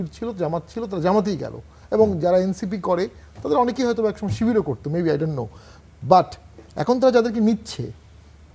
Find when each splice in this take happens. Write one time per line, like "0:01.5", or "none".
none